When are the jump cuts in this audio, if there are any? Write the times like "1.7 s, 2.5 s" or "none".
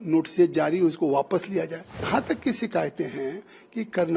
2.1 s